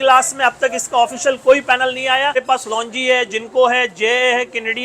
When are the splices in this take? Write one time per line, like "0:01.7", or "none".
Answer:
0:02.4